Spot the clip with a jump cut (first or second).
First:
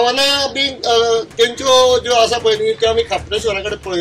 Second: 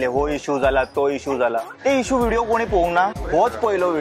second